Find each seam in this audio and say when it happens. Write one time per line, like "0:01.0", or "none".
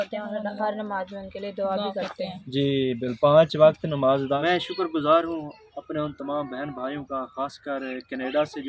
0:04.4